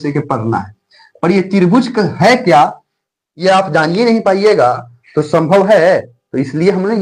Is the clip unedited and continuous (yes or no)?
yes